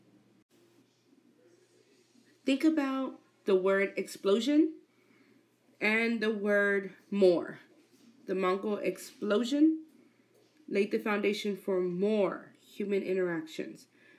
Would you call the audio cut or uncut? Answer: cut